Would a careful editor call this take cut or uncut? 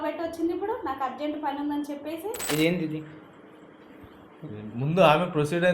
cut